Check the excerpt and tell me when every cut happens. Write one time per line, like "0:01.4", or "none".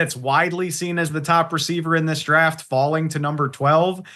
none